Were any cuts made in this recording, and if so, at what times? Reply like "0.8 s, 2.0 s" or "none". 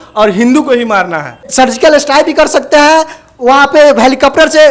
1.5 s